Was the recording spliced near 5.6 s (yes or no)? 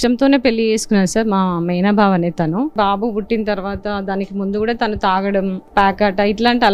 yes